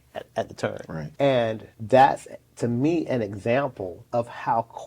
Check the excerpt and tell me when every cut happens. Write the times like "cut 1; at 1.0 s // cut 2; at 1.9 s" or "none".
cut 1; at 1.0 s // cut 2; at 1.7 s // cut 3; at 3.9 s